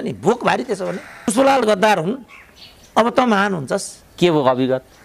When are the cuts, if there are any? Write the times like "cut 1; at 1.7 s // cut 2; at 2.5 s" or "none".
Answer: cut 1; at 1.3 s